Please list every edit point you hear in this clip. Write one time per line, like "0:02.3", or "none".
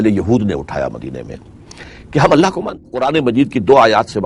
0:03.0